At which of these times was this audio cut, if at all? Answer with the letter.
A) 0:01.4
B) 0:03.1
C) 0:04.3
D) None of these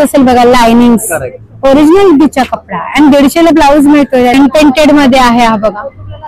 C